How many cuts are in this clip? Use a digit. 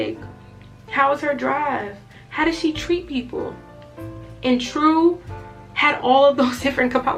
0